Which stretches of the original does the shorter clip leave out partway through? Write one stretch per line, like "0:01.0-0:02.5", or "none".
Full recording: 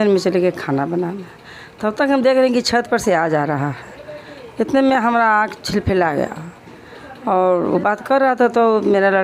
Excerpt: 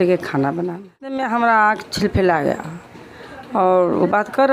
0:01.5-0:04.9

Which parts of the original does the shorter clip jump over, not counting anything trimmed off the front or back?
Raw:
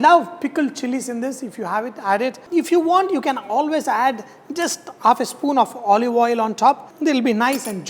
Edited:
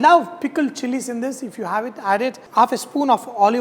0:02.4-0:04.9

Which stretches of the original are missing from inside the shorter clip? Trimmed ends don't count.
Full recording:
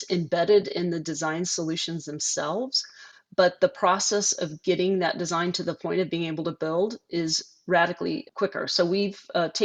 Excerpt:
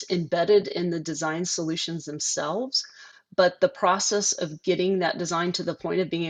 none

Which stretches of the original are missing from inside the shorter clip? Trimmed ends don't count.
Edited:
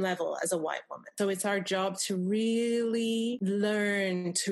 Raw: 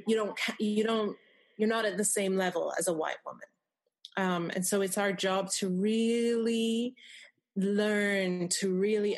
0:03.5-0:04.7
0:06.9-0:07.5

